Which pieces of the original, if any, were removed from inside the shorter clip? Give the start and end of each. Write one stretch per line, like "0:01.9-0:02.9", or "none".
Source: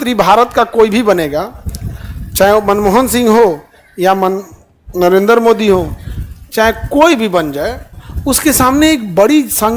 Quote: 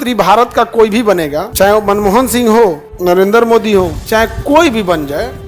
0:01.4-0:02.2
0:03.7-0:04.8
0:05.9-0:06.4